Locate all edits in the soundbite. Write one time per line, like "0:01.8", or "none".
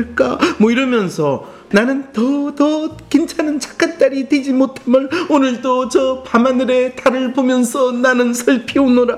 0:01.6

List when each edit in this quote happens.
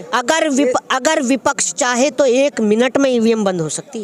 none

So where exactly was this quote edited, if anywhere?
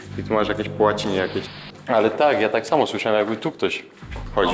0:01.7

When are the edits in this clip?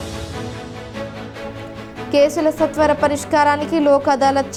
none

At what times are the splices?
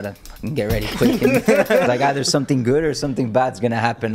0:01.9

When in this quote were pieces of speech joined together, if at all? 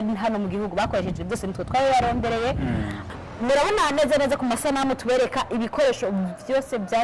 0:03.0

